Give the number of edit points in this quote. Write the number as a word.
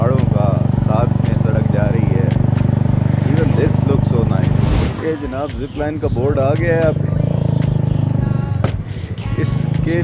one